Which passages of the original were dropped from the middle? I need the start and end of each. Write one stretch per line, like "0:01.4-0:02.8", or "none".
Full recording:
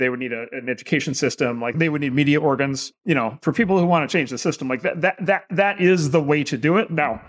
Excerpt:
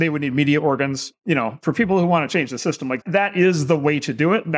0:04.8-0:05.4